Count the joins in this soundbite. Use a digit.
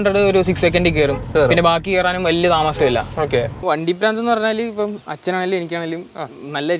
1